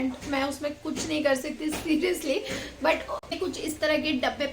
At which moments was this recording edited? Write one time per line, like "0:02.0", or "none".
0:03.3